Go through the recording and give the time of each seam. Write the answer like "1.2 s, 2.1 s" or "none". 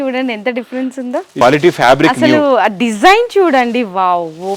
1.4 s